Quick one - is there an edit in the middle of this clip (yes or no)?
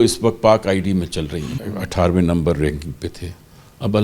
yes